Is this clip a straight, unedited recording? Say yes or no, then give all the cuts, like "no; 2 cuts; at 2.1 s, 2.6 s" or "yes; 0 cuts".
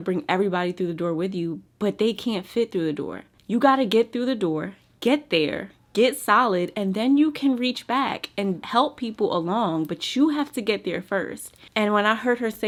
yes; 0 cuts